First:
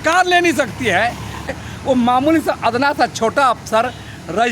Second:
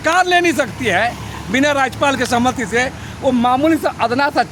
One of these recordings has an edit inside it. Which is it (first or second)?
first